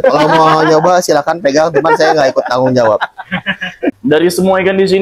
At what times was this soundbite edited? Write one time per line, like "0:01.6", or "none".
0:04.0